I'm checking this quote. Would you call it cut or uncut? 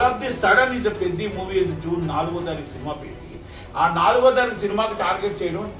uncut